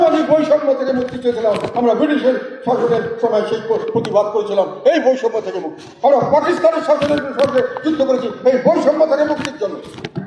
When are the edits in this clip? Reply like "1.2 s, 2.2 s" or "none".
none